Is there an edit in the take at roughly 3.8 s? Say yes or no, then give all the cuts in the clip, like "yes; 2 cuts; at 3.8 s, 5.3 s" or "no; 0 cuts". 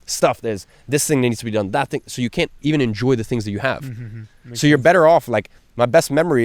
no; 0 cuts